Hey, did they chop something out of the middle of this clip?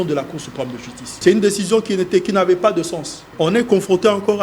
yes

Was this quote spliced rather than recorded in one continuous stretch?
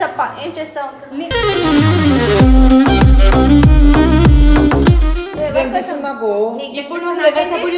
yes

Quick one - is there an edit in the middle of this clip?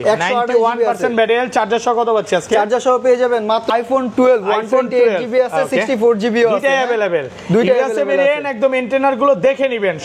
yes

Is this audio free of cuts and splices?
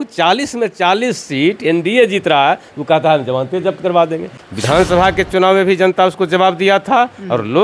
no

